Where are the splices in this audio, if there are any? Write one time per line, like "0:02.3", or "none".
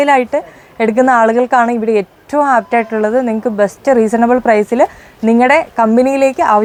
none